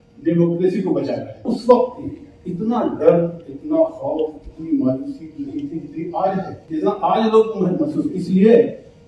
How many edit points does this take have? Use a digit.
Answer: 2